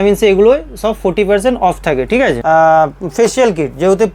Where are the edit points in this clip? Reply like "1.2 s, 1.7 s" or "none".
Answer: 2.4 s